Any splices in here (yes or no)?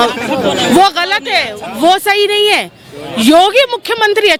no